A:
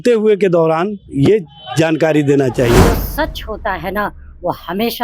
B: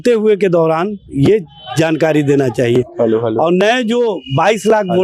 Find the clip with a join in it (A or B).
A